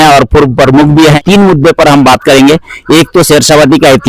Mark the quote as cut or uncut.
cut